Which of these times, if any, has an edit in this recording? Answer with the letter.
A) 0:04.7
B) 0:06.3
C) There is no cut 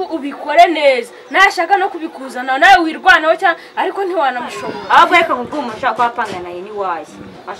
A